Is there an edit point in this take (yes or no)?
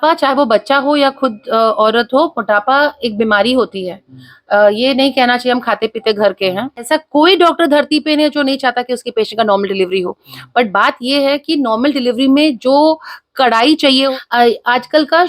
yes